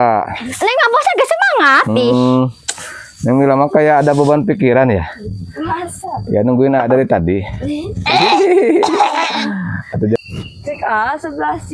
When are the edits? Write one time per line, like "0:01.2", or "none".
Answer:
0:10.2